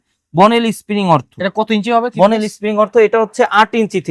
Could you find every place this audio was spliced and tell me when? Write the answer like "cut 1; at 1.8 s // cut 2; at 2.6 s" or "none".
none